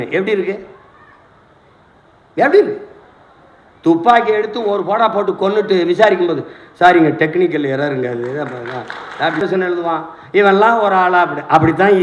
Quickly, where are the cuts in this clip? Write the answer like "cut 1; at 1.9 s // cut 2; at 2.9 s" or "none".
cut 1; at 9.4 s